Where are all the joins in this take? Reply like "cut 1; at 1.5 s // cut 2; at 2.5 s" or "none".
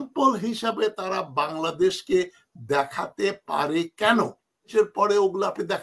cut 1; at 4.7 s